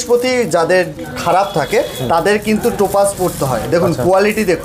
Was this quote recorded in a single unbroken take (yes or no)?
yes